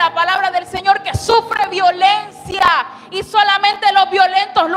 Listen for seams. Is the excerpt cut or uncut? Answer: uncut